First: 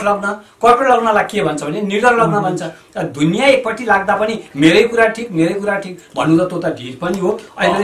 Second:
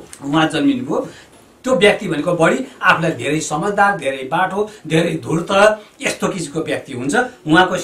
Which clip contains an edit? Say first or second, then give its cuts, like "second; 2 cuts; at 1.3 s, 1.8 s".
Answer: second; 1 cut; at 1.2 s